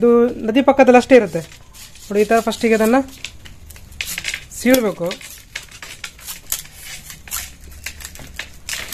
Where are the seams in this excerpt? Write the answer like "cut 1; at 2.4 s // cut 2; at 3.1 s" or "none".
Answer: none